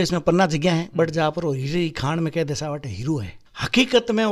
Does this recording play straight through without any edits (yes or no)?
yes